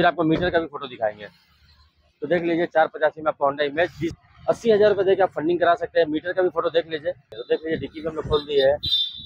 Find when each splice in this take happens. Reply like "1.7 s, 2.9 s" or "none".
4.2 s, 7.3 s